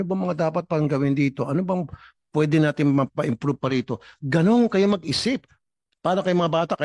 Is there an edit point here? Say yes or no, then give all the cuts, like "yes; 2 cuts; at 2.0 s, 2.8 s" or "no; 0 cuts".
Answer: yes; 1 cut; at 5.5 s